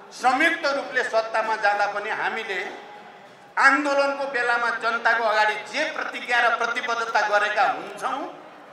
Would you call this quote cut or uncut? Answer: uncut